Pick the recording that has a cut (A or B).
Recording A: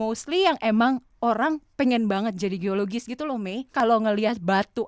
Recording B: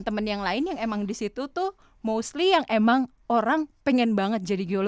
A